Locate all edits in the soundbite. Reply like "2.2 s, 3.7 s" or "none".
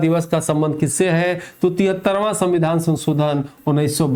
none